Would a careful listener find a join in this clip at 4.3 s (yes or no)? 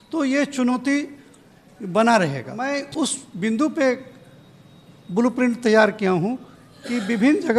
no